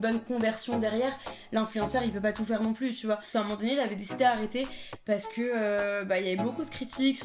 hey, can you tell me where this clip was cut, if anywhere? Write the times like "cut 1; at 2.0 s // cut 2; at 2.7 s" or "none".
cut 1; at 3.2 s